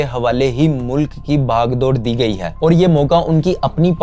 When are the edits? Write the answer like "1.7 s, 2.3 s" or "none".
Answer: 2.5 s